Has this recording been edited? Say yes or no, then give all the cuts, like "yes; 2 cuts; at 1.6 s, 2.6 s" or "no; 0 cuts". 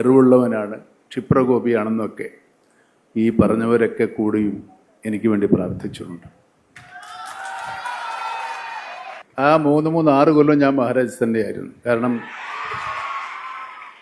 yes; 1 cut; at 9.2 s